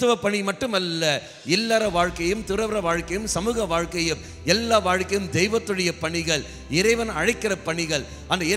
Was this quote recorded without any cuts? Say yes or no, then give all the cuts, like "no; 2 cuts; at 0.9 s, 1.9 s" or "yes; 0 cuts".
yes; 0 cuts